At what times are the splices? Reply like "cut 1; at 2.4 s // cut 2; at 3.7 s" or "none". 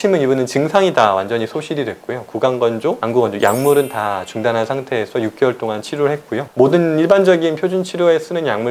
none